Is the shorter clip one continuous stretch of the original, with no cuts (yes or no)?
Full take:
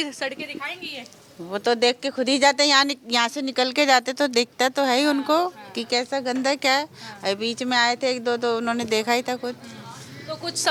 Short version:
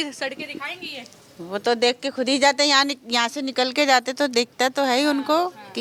yes